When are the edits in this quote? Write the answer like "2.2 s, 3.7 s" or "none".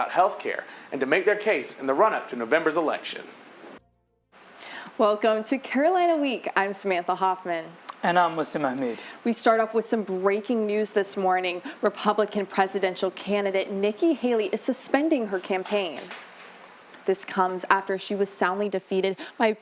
3.8 s